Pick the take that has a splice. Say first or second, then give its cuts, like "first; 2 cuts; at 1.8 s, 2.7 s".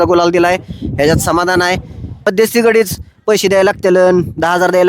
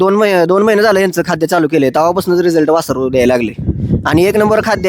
first; 1 cut; at 2.1 s